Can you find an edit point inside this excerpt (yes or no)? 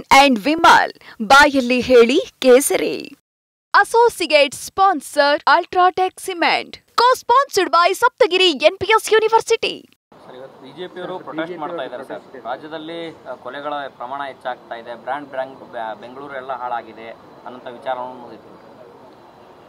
yes